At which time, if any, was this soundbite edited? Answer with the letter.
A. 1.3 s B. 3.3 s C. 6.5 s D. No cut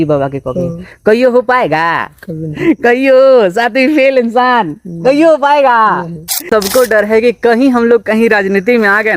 C